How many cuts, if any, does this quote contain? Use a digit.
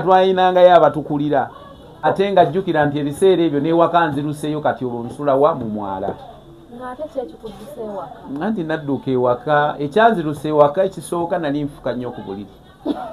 1